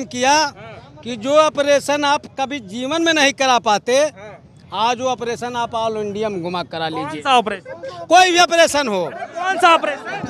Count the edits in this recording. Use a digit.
0